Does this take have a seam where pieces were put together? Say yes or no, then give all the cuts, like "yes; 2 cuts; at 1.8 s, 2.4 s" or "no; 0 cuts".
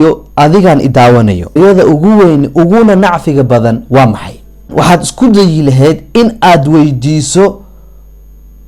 no; 0 cuts